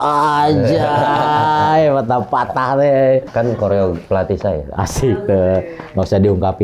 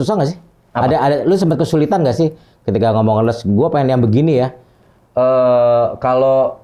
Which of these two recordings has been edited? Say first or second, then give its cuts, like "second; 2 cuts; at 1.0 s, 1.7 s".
first; 1 cut; at 3.3 s